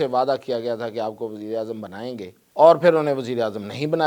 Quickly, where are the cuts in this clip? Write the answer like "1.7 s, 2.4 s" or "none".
2.4 s